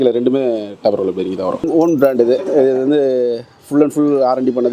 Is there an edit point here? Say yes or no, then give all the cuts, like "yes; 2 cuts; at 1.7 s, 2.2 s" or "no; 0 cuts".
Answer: yes; 1 cut; at 1.6 s